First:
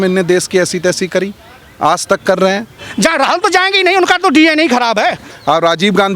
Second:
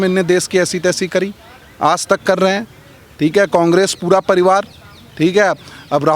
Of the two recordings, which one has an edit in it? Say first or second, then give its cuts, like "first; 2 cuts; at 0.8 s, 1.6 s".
first; 2 cuts; at 2.8 s, 5.3 s